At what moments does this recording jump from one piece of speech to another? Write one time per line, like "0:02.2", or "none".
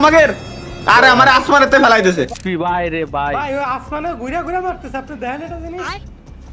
0:02.3